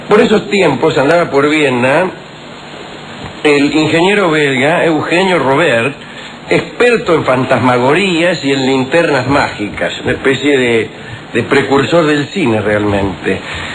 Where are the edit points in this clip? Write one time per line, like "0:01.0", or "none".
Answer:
none